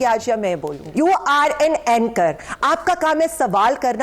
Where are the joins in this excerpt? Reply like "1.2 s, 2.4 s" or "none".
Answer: 0.9 s